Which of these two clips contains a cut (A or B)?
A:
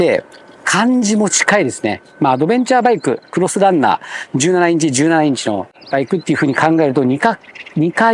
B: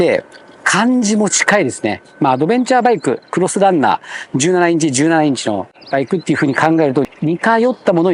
B